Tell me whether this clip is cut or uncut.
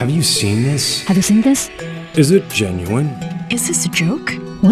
uncut